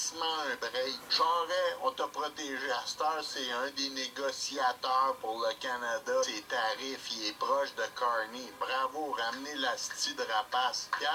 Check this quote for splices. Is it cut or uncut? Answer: uncut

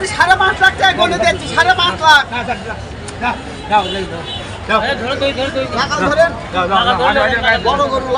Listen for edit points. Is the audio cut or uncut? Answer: uncut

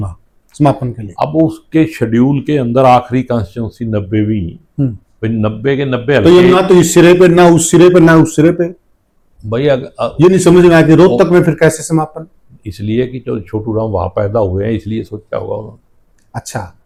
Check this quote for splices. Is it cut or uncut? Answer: uncut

